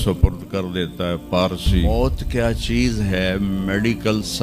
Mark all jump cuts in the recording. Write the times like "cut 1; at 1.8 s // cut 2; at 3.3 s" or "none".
cut 1; at 1.9 s